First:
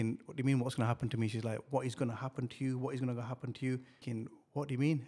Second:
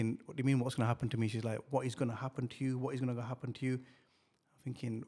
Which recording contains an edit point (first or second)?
first